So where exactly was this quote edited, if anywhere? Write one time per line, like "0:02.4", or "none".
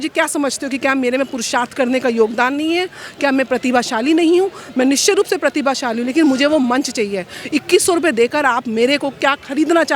none